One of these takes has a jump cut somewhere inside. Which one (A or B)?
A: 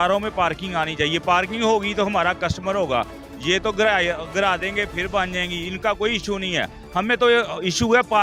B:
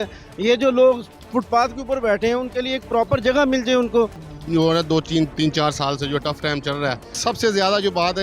B